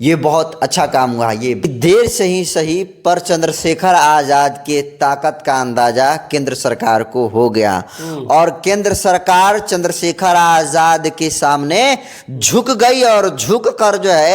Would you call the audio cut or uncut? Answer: cut